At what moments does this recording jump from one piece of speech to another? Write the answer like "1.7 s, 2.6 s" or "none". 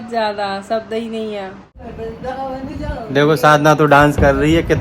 1.6 s